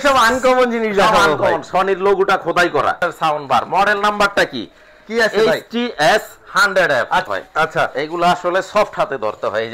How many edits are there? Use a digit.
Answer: 2